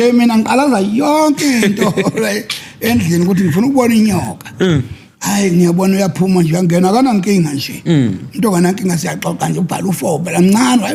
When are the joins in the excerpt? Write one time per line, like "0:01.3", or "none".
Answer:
none